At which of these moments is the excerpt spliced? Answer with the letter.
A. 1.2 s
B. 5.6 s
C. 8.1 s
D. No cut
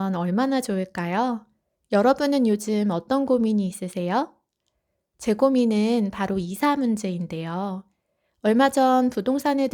D